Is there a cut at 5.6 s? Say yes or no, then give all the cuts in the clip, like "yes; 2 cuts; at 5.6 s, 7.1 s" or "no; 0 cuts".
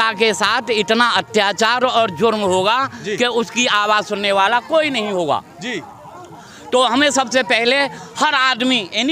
no; 0 cuts